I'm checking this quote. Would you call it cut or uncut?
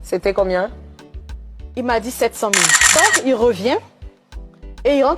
cut